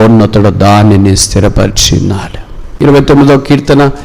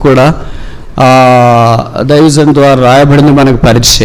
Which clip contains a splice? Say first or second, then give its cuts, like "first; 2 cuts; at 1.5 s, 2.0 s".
first; 1 cut; at 2.7 s